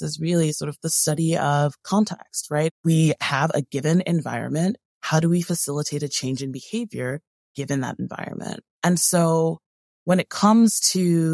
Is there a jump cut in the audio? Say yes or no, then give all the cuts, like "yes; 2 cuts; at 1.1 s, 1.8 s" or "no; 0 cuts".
yes; 2 cuts; at 2.8 s, 8.6 s